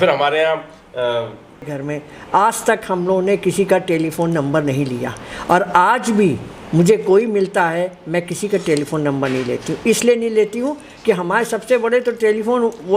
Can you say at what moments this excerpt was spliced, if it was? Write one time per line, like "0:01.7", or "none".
0:01.8